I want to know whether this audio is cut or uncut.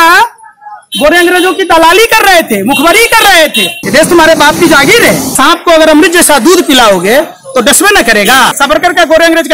cut